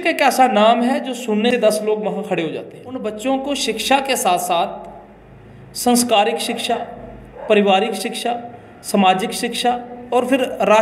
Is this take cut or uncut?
cut